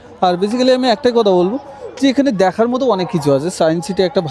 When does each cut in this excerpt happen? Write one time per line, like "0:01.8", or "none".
none